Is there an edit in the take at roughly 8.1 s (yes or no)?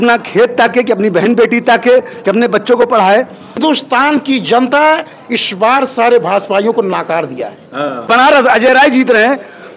yes